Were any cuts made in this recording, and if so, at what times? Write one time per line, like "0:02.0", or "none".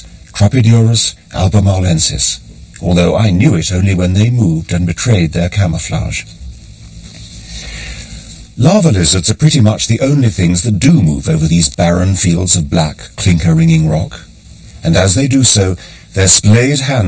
none

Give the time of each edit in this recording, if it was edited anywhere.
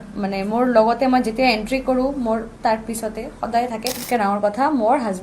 0:04.0

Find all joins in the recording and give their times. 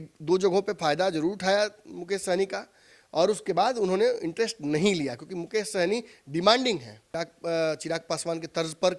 0:07.1

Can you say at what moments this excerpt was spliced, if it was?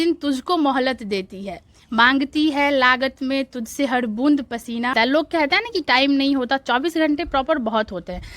0:04.9

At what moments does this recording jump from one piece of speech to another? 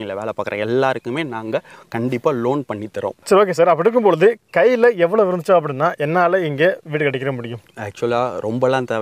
none

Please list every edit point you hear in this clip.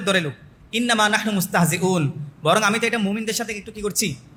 none

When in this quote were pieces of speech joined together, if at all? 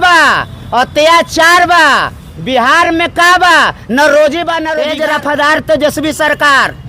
0:04.7

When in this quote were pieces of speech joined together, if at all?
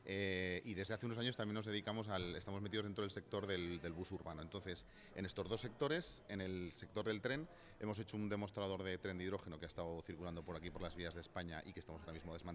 none

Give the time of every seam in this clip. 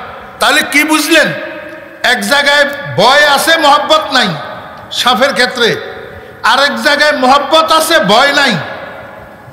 none

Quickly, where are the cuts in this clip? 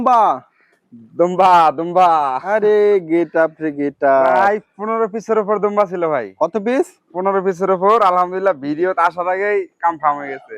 none

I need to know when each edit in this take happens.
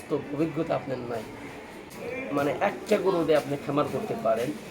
0:01.8

